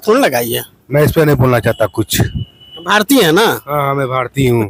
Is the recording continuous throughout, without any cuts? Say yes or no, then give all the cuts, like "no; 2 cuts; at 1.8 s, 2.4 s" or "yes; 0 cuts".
yes; 0 cuts